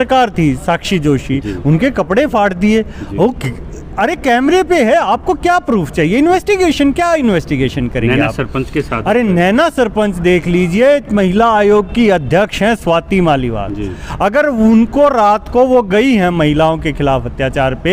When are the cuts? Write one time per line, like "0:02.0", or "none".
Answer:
none